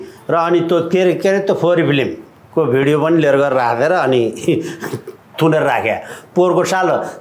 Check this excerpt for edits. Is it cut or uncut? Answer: uncut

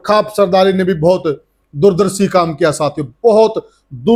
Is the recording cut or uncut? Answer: uncut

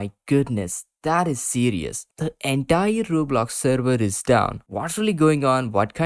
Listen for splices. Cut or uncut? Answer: cut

